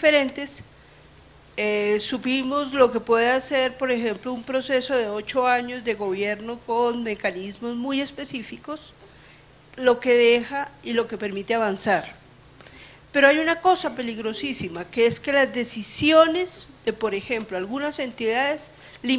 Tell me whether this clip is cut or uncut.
uncut